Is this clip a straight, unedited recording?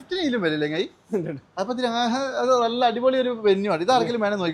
yes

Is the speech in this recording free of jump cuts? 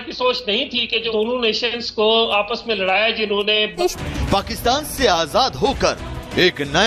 no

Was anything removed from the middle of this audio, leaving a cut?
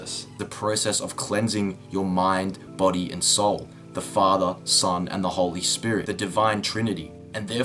yes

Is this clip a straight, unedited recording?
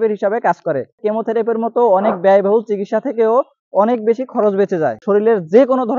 no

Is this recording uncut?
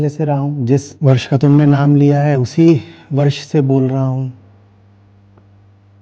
no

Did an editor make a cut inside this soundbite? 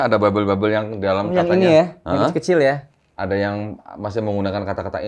no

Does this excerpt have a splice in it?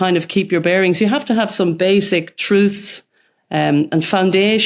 no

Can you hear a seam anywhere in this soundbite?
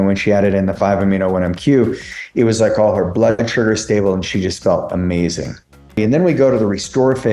yes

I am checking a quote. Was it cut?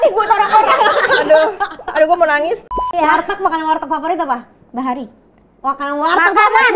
yes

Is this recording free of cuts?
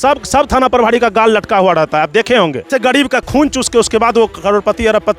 no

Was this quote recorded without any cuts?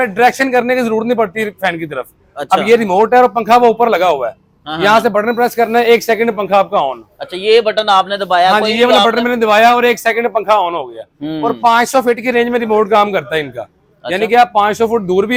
yes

